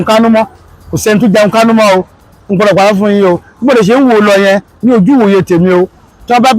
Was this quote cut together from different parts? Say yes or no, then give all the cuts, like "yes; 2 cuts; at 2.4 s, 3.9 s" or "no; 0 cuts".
no; 0 cuts